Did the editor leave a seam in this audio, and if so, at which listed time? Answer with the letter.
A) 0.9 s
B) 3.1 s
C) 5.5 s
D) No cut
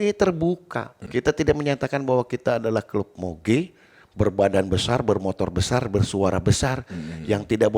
A